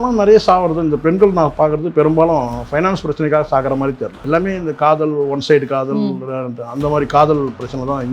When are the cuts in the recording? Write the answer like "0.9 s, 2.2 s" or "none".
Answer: 4.2 s